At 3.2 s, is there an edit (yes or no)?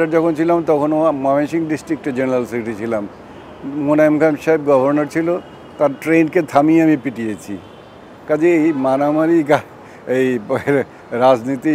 no